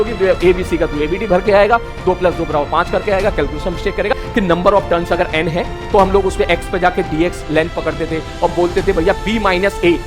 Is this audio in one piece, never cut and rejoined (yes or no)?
no